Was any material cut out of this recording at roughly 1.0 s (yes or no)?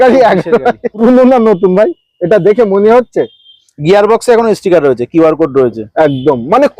yes